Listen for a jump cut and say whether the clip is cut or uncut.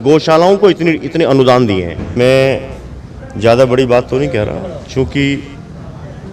cut